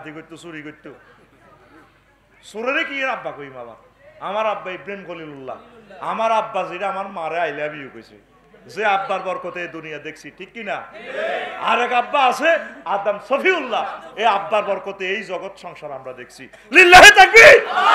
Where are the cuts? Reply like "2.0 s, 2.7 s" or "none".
none

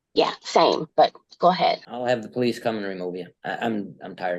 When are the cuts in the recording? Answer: 0.9 s, 1.9 s, 3.3 s

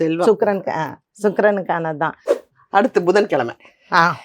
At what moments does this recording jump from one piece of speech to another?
2.4 s

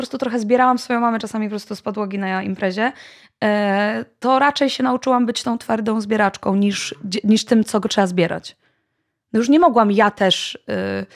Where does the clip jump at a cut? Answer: none

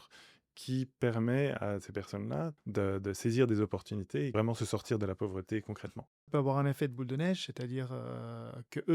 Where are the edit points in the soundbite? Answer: 2.6 s, 4.3 s, 6.3 s

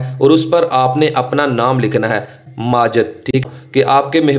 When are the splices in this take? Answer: 2.4 s, 3.4 s

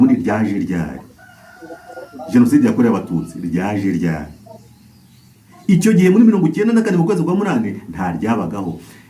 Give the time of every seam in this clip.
none

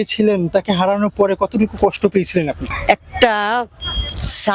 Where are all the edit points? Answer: 2.7 s

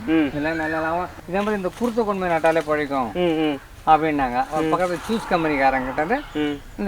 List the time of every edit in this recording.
1.1 s

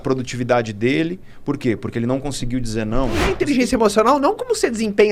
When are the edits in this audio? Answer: 3.2 s

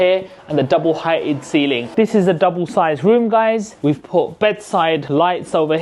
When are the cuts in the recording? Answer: 1.9 s

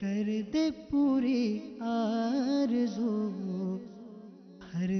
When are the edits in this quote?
none

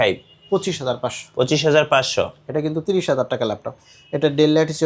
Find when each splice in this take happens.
none

